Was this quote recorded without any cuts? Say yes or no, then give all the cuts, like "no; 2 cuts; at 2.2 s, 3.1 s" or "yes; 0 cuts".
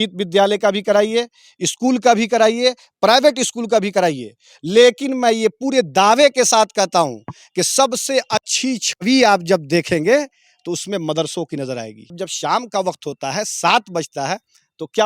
no; 1 cut; at 12.2 s